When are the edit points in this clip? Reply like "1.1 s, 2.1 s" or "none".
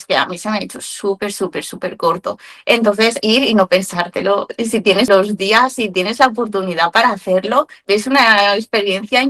3.2 s, 5.1 s, 7.7 s